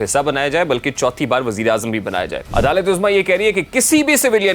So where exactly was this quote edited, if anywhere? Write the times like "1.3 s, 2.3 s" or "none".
2.4 s